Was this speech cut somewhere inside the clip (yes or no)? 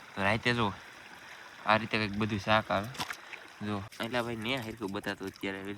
yes